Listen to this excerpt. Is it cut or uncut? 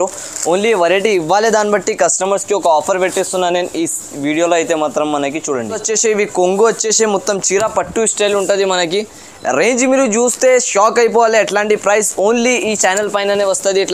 cut